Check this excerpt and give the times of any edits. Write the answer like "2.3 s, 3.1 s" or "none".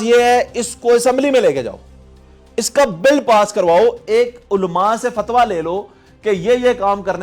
none